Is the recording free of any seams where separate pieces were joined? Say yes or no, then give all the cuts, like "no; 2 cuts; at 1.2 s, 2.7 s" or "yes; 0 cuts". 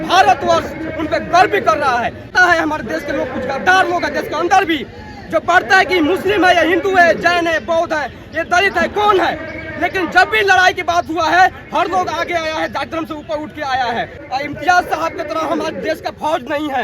no; 2 cuts; at 2.3 s, 14.2 s